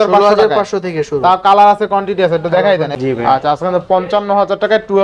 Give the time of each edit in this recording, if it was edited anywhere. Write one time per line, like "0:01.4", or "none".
0:02.9